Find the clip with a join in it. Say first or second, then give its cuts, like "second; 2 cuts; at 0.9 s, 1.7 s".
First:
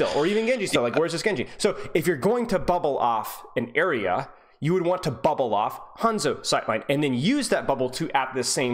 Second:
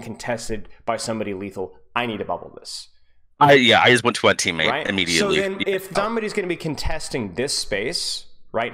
second; 1 cut; at 6.0 s